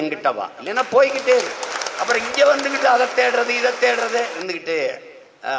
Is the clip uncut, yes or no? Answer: no